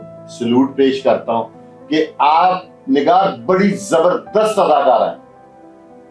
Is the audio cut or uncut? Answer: uncut